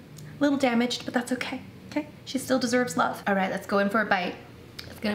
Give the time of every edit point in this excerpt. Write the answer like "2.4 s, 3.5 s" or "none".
3.2 s